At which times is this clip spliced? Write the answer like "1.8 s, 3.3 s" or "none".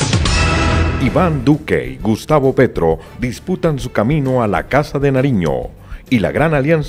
1.0 s

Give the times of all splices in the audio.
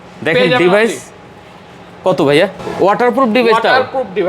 2.6 s

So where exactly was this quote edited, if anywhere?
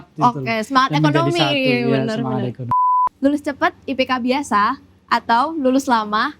2.8 s

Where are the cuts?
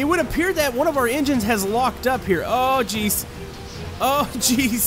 none

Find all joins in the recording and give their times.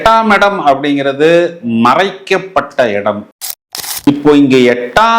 3.4 s

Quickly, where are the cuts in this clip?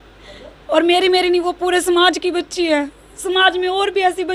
none

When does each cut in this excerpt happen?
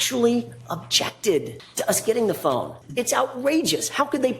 1.6 s, 2.8 s

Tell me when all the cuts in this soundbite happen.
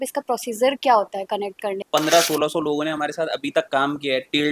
1.8 s

